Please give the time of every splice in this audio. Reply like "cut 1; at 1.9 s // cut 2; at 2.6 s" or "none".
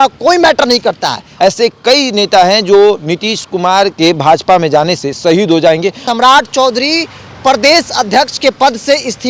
cut 1; at 1.3 s // cut 2; at 3.9 s // cut 3; at 6.0 s